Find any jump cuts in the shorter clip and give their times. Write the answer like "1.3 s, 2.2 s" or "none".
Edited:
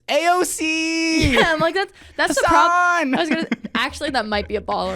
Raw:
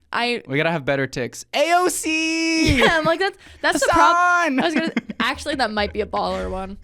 none